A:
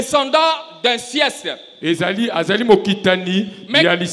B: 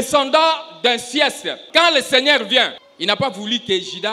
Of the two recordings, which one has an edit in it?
B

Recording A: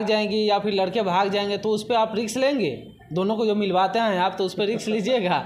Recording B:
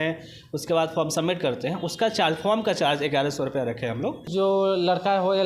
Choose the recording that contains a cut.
B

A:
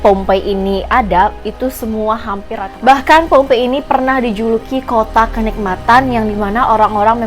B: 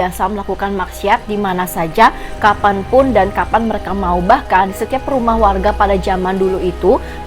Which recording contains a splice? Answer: A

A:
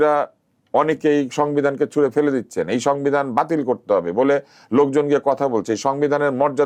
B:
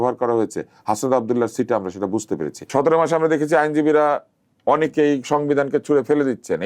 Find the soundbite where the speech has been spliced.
B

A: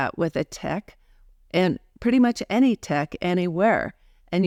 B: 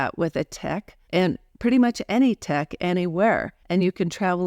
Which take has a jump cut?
B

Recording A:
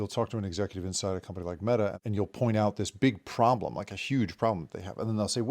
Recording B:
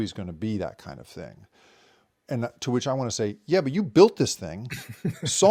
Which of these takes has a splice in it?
A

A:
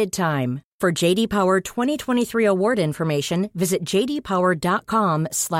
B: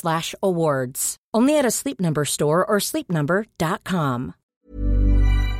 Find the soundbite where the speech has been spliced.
B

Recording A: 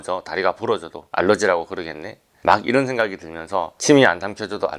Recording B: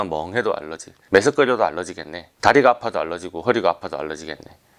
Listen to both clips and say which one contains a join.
B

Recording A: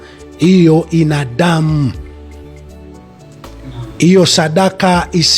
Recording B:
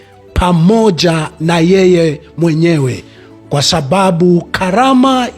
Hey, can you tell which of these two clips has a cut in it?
A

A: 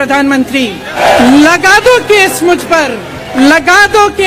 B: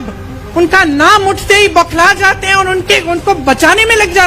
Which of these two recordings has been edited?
A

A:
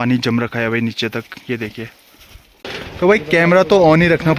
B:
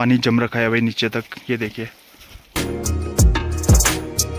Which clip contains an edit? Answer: A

